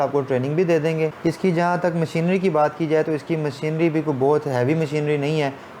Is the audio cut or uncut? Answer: cut